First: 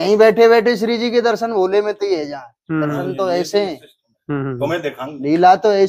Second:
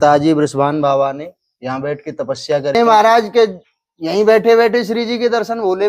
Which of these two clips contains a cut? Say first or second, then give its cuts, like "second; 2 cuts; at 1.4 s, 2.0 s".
second; 1 cut; at 2.8 s